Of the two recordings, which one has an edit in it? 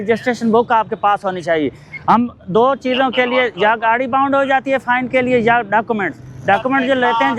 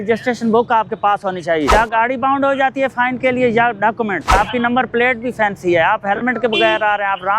second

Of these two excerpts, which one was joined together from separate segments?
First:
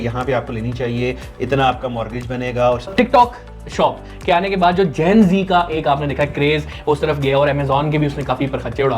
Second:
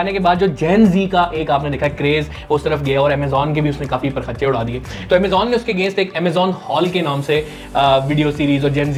first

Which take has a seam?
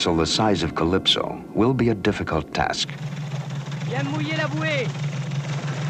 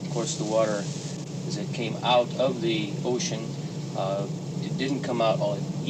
first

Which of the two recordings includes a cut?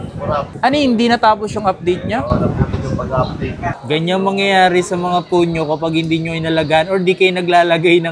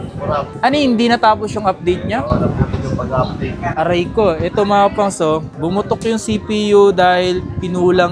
first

